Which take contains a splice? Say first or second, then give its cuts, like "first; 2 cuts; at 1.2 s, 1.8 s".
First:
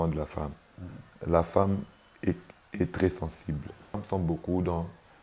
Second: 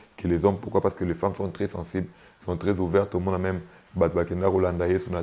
first; 1 cut; at 4.0 s